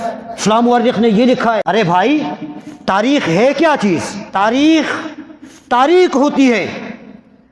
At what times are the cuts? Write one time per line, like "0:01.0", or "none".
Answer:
0:01.6
0:04.2

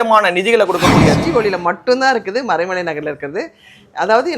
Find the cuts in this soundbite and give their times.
0:01.2

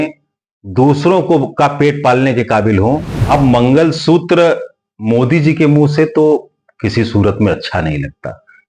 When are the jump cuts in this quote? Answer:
0:03.1

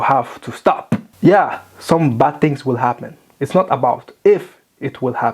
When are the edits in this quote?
0:01.1

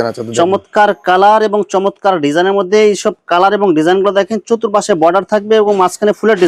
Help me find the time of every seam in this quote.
none

